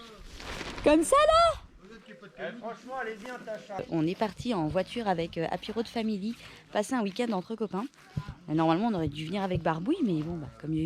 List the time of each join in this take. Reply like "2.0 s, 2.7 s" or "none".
3.8 s